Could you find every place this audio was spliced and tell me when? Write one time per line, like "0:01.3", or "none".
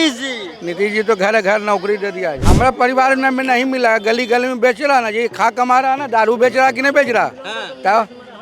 0:02.4

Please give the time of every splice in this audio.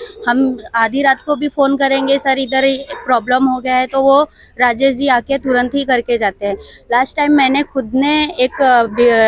none

